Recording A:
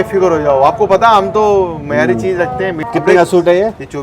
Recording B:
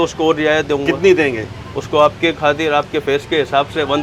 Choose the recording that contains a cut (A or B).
A